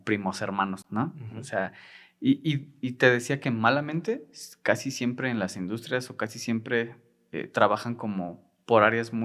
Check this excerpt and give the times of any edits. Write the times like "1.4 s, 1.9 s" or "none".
none